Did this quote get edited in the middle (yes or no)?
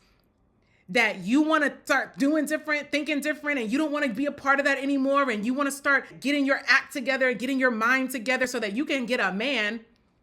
yes